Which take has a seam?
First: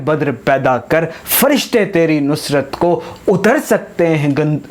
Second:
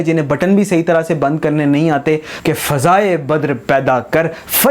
second; 1 cut; at 2.3 s

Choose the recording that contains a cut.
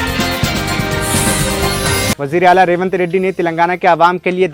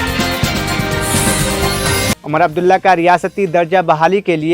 second; 1 cut; at 2.1 s

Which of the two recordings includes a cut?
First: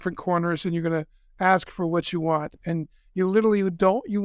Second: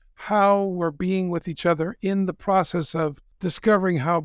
second; 1 cut; at 3.3 s

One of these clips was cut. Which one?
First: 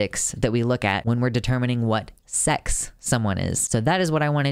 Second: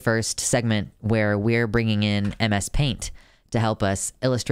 first; 2 cuts; at 1.0 s, 3.6 s

